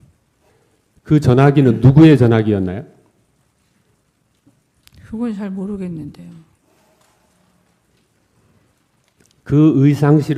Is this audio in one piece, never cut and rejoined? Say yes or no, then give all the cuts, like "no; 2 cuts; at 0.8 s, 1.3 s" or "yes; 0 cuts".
yes; 0 cuts